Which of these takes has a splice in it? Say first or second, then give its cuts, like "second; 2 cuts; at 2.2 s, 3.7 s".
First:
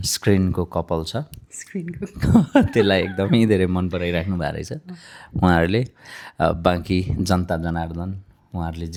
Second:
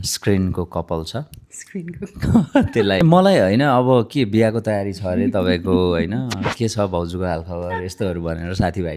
second; 1 cut; at 3.0 s